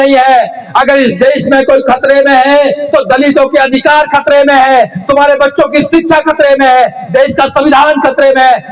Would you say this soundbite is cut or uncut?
uncut